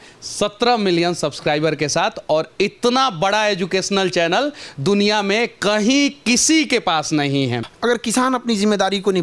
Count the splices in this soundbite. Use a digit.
1